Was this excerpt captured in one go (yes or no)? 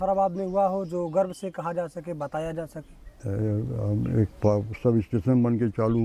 yes